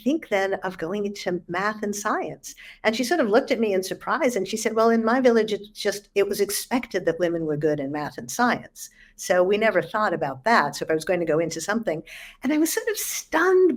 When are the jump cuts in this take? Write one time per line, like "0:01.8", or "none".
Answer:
none